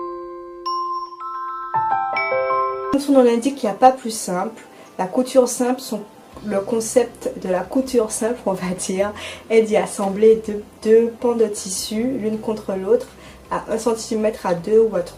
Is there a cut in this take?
yes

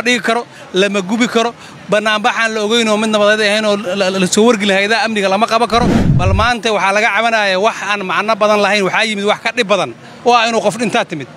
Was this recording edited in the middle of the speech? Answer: yes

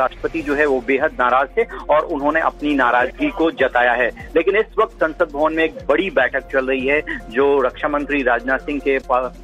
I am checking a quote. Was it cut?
yes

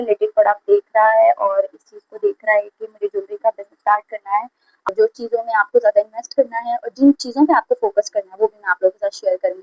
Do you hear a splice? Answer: yes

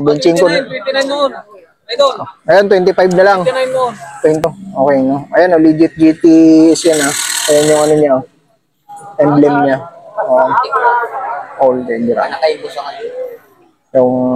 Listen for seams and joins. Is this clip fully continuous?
no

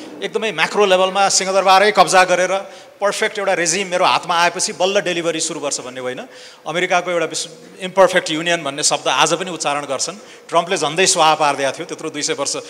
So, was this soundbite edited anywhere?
no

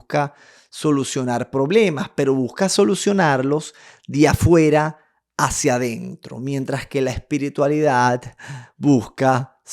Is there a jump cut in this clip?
no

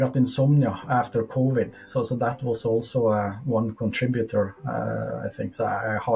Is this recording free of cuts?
yes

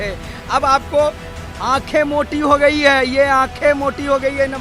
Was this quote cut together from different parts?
no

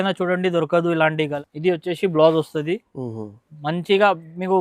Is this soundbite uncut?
no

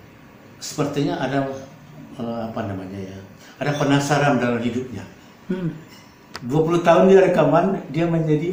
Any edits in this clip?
no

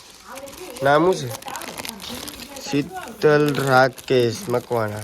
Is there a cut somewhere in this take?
no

